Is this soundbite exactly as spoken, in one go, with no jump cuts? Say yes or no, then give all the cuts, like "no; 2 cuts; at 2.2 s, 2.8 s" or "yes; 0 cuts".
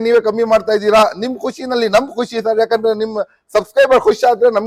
yes; 0 cuts